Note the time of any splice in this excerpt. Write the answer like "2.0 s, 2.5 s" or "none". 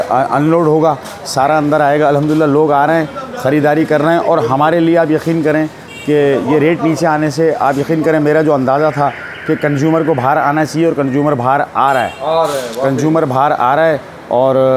none